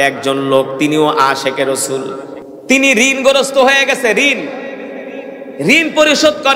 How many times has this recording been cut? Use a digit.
1